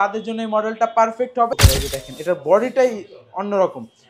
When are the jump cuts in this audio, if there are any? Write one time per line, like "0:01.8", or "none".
0:01.5